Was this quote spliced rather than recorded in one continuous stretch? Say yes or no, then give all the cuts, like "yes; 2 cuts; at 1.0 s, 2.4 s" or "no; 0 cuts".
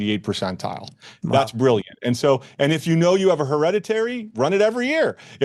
no; 0 cuts